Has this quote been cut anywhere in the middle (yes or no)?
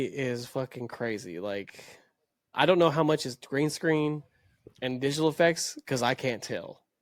no